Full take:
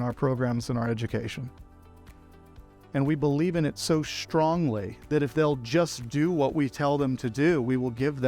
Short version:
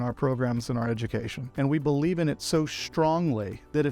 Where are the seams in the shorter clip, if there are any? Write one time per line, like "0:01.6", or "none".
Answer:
0:01.4